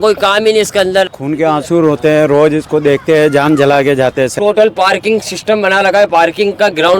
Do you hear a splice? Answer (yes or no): yes